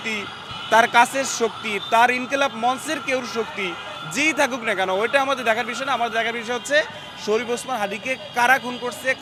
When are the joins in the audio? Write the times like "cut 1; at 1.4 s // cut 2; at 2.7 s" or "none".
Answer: none